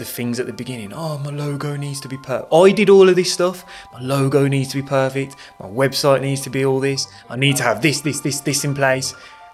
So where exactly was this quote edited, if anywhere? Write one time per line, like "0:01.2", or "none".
none